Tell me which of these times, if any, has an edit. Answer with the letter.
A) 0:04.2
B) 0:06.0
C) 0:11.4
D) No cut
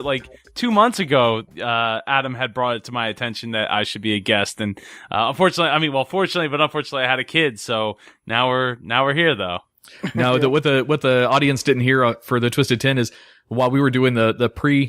D